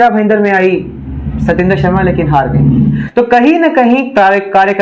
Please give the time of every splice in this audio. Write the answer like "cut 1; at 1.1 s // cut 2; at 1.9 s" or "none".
cut 1; at 3.0 s